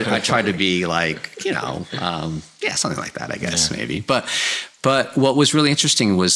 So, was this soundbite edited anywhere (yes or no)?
no